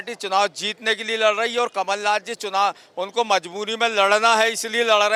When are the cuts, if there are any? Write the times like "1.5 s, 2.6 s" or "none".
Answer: none